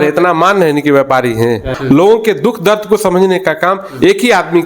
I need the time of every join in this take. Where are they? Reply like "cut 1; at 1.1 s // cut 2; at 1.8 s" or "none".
cut 1; at 1.7 s